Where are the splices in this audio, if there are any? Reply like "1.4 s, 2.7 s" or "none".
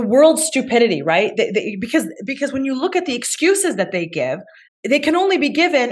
none